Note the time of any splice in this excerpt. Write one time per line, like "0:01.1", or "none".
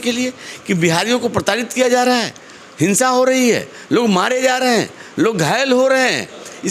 none